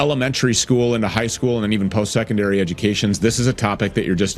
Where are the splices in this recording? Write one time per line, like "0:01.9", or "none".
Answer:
none